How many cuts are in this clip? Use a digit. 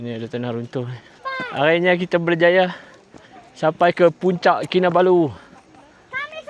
1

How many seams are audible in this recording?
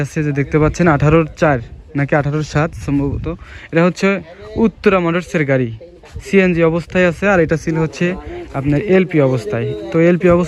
0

